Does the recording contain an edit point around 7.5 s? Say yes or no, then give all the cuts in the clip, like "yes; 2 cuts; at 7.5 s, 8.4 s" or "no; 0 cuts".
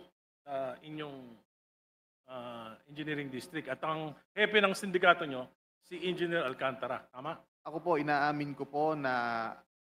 yes; 1 cut; at 7.5 s